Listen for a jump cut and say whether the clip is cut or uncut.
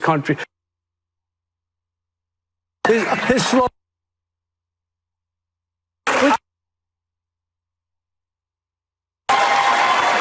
uncut